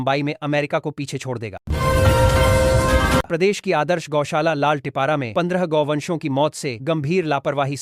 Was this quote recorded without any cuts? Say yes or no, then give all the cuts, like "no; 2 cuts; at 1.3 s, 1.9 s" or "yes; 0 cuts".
no; 2 cuts; at 1.6 s, 3.3 s